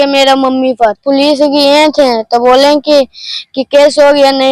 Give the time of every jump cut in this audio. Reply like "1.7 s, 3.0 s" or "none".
1.0 s